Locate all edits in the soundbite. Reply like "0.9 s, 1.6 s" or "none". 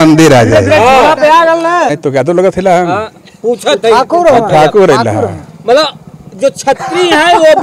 2.0 s